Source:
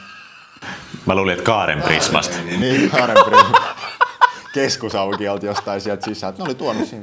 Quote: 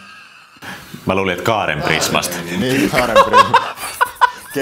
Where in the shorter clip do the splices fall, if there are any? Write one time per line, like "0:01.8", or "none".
none